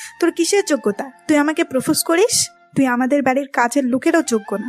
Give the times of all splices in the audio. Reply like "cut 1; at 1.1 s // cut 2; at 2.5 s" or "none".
none